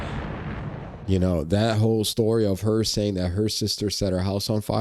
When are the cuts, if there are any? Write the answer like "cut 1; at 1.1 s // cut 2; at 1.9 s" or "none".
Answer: cut 1; at 1.0 s

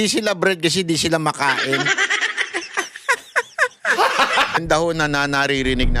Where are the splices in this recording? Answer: cut 1; at 4.6 s

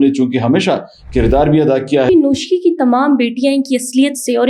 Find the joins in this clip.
cut 1; at 2.1 s

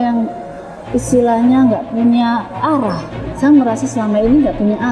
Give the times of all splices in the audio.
none

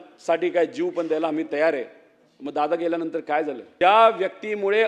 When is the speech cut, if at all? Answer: cut 1; at 3.6 s

